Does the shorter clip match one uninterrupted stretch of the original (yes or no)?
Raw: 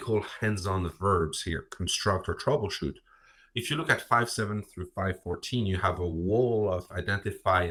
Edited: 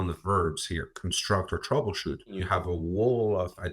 no